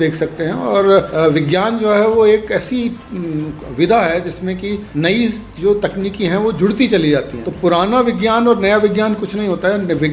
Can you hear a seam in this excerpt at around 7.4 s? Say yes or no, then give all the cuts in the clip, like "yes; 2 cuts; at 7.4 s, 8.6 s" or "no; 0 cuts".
yes; 3 cuts; at 1.1 s, 4.9 s, 7.4 s